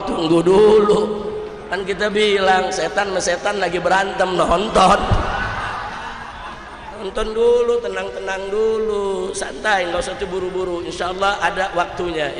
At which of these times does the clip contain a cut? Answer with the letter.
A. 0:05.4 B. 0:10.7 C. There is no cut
C